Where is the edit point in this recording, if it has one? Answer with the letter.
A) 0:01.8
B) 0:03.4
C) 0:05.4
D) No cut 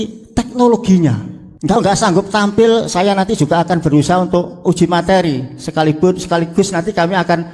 A